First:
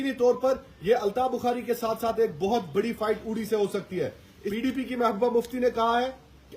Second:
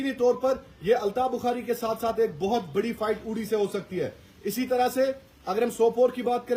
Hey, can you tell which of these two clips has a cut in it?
first; 1 cut; at 4.4 s

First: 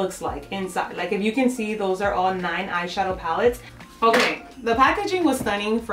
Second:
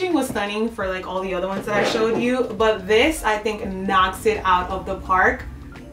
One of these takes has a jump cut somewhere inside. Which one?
first; 1 cut; at 3.7 s

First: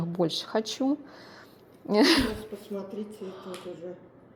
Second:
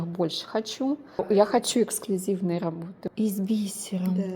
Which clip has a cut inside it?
second; 2 cuts; at 1.2 s, 2.9 s

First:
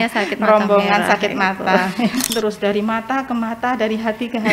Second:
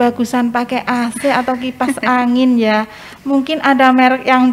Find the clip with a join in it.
first; 1 cut; at 2.3 s

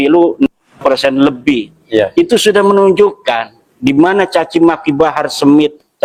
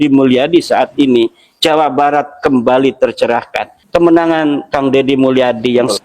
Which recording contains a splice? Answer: second; 1 cut; at 3.7 s

